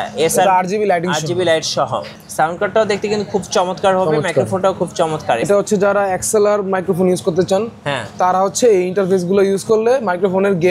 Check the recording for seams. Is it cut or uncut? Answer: cut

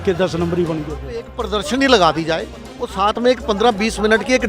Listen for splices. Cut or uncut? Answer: cut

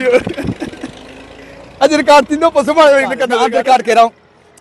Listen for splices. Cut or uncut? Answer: cut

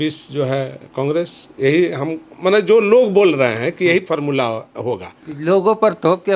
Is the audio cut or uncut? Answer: uncut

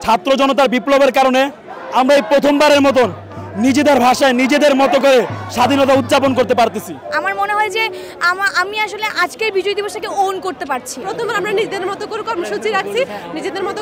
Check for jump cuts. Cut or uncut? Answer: cut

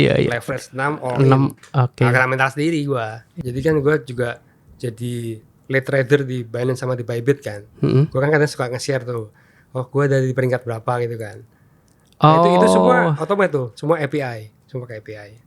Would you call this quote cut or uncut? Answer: cut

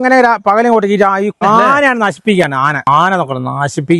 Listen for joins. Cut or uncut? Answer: cut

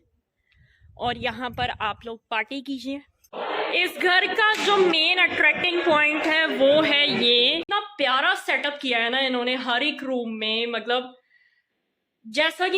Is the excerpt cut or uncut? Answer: cut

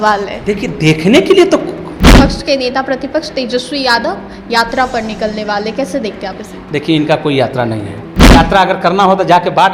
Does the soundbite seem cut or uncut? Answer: cut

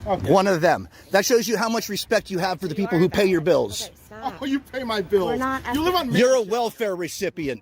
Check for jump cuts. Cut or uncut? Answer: uncut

